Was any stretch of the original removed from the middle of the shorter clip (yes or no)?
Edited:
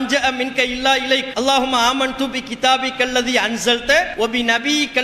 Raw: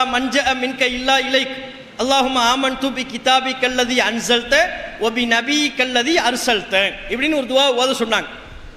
yes